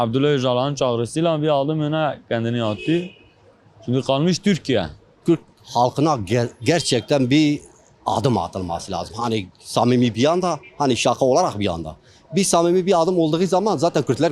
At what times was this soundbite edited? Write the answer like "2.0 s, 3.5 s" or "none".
5.2 s